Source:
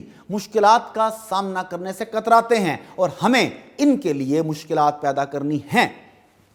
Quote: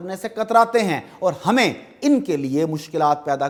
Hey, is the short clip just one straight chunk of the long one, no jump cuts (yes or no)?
yes